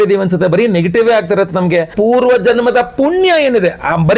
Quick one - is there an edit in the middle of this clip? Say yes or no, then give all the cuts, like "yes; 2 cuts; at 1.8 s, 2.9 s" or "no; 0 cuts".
yes; 1 cut; at 1.9 s